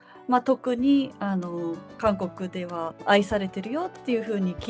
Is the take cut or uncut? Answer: cut